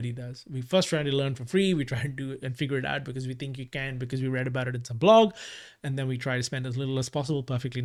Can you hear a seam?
no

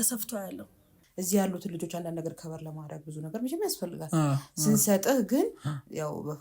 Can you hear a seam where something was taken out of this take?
yes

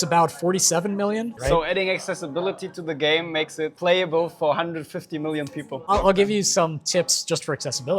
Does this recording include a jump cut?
yes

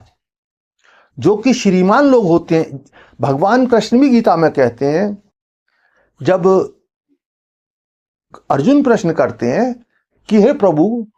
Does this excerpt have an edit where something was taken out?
no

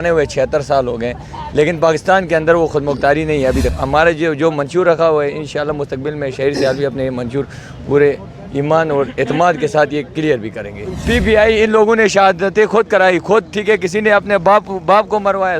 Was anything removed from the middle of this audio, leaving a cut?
yes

